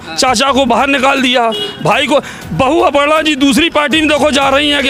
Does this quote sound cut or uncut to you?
uncut